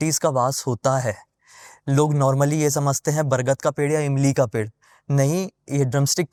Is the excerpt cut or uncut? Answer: uncut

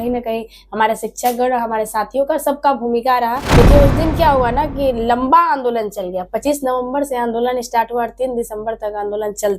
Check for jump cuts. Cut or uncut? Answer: cut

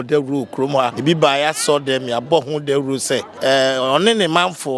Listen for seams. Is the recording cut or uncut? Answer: cut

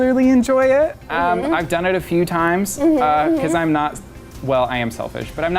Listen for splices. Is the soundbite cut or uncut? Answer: uncut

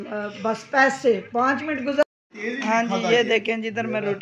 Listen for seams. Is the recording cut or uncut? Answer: cut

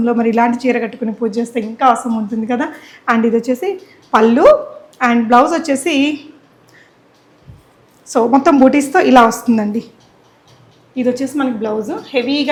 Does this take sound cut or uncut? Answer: uncut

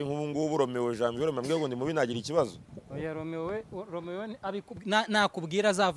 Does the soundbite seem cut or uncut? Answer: uncut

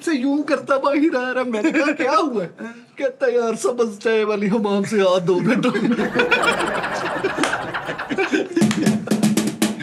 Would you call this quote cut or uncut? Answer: uncut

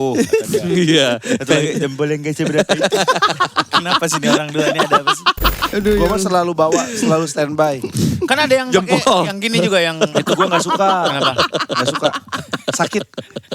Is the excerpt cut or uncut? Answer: cut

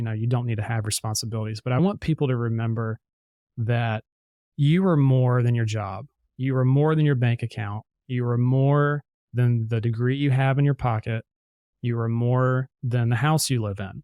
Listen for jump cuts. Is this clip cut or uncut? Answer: uncut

